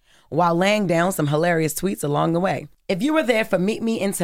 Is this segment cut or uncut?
uncut